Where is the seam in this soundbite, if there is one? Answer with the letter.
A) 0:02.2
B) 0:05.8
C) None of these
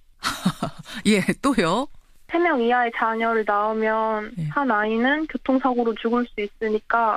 C